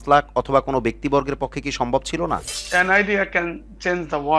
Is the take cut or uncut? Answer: cut